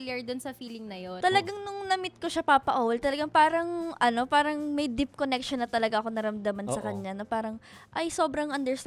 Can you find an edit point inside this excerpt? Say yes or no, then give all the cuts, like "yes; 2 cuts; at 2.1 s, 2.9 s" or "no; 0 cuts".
yes; 1 cut; at 1.1 s